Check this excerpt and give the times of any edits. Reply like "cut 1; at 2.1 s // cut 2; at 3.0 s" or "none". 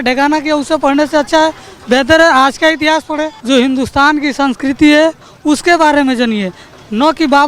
cut 1; at 3.4 s